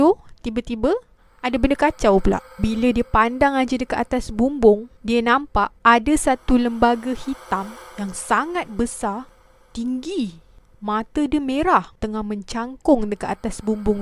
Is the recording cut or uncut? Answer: uncut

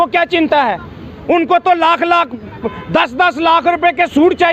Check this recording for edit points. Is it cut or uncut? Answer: uncut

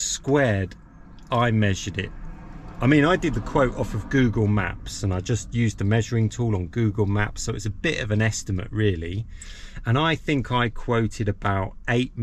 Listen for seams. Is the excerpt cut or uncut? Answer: uncut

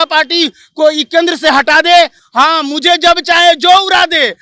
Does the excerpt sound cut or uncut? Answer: uncut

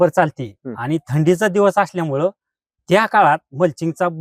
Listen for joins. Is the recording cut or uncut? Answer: uncut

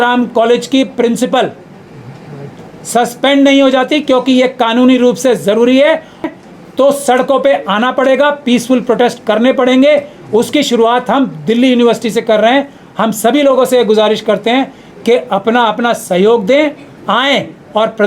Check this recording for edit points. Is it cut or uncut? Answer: cut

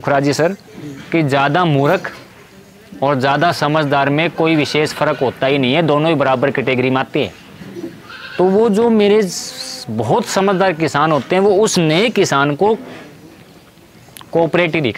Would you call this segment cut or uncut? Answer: uncut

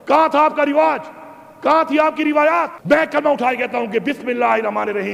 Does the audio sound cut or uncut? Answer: cut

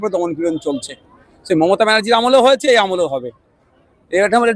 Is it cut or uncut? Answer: uncut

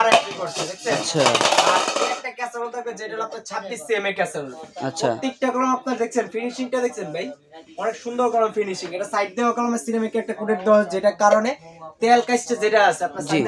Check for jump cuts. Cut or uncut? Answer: uncut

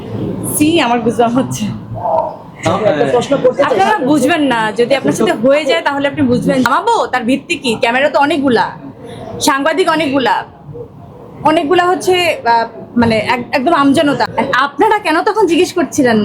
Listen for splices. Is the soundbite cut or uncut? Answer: cut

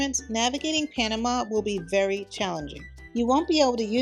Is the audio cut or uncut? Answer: cut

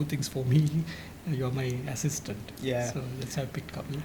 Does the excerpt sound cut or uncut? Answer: uncut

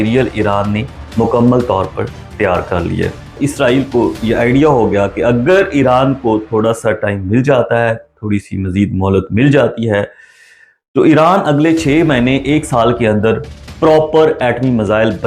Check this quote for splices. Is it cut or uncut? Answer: cut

